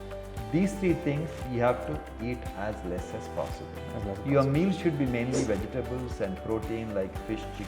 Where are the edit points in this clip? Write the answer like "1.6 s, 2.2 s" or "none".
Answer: none